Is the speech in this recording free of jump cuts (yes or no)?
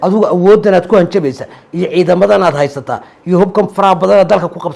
yes